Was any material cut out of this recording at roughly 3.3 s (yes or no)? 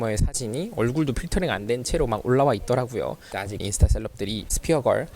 yes